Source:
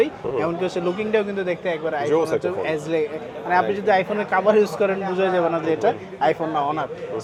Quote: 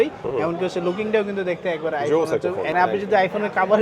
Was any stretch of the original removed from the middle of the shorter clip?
yes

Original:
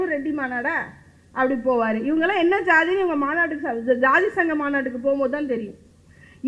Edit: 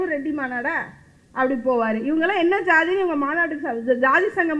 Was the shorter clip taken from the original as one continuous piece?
yes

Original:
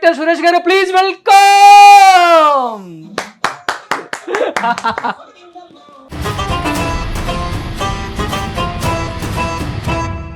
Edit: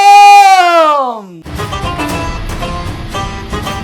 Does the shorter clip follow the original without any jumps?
no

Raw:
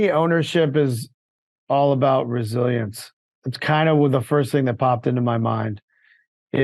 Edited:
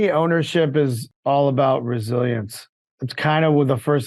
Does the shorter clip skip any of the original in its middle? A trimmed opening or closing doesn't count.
yes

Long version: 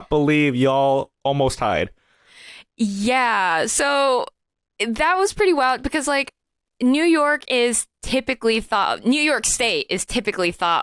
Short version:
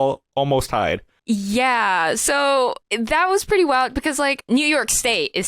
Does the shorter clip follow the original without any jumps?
no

